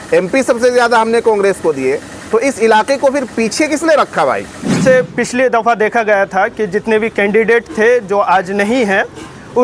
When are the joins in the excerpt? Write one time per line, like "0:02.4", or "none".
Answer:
0:04.8